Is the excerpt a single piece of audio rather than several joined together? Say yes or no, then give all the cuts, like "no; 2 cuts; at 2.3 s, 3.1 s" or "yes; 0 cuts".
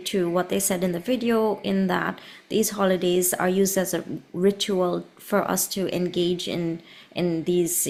yes; 0 cuts